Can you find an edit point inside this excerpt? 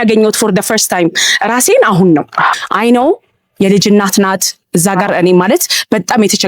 yes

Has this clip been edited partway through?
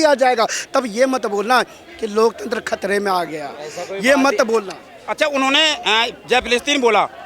no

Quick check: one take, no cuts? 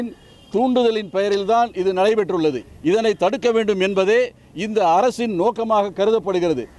no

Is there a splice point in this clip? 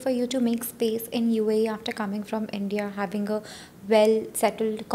no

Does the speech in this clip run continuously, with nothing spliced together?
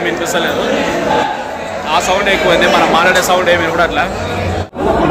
yes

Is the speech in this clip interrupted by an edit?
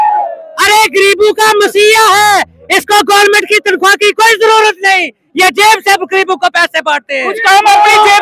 no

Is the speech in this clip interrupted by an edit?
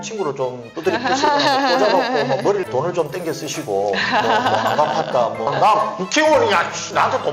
yes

